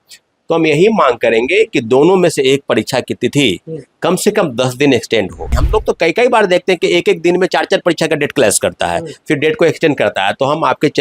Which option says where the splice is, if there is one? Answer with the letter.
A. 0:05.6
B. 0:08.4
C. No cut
A